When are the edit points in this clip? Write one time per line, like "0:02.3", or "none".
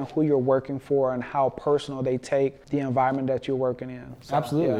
0:02.6